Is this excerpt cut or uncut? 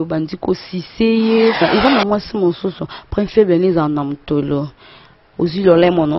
cut